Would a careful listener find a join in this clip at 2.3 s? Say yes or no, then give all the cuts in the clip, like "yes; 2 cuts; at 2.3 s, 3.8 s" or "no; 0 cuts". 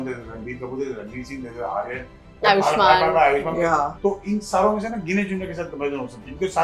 no; 1 cut; at 3.8 s